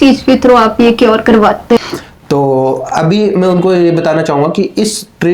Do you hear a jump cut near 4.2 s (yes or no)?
no